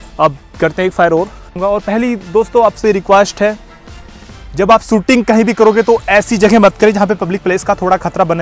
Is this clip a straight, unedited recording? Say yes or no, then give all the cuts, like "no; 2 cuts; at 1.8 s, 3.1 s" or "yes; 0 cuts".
no; 1 cut; at 1.6 s